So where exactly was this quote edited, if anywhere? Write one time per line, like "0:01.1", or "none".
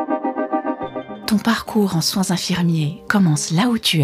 0:01.1
0:03.0